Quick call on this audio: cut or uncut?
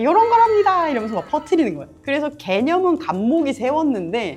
uncut